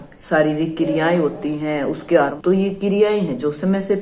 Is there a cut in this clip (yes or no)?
yes